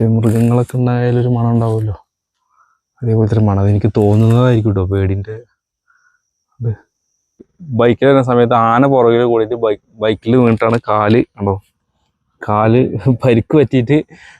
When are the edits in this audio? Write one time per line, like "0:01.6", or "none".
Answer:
0:07.6